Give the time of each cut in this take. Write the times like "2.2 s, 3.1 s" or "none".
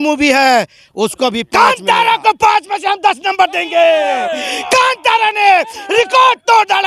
1.4 s